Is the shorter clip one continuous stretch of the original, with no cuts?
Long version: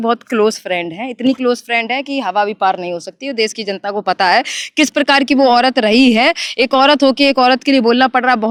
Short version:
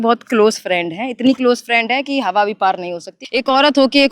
no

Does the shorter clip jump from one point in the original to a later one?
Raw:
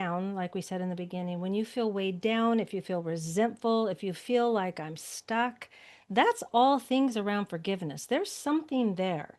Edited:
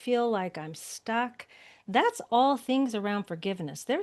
no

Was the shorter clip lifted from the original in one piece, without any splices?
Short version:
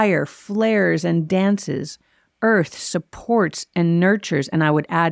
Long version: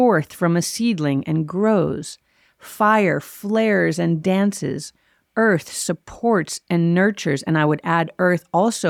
yes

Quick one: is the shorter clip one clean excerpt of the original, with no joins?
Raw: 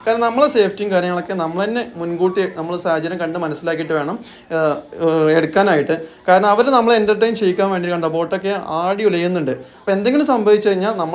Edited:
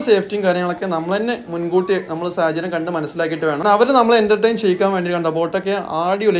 no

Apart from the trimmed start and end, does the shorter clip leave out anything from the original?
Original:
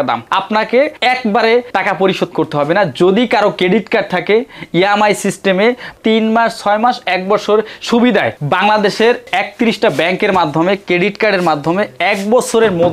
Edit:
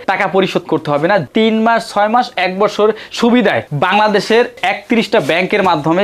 yes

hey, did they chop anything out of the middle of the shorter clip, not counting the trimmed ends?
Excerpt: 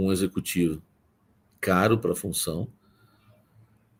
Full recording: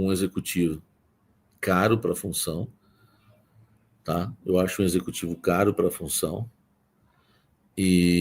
no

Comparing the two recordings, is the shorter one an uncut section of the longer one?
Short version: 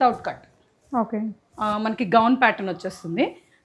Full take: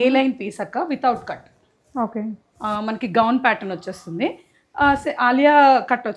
yes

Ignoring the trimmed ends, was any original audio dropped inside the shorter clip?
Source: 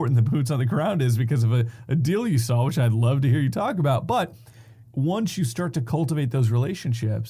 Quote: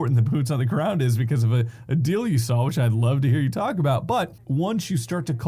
yes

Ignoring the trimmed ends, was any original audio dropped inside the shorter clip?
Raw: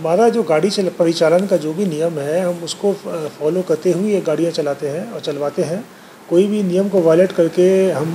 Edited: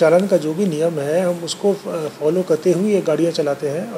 no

